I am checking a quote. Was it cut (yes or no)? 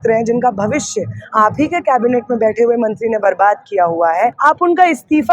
yes